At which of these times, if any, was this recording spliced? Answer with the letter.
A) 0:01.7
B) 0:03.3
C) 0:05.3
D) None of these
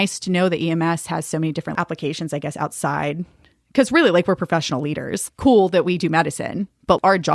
A